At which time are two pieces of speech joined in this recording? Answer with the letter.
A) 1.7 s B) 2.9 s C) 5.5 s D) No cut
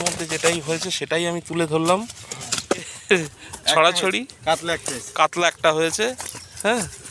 B